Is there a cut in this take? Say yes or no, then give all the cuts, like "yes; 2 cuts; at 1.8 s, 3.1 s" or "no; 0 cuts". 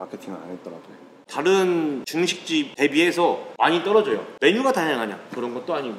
yes; 4 cuts; at 1.1 s, 2.4 s, 3.5 s, 4.3 s